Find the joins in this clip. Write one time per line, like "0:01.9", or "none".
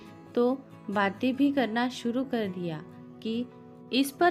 none